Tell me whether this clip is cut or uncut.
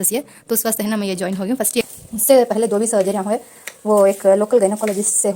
cut